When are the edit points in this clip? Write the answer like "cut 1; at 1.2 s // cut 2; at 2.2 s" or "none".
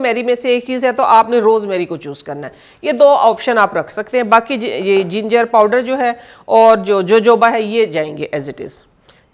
none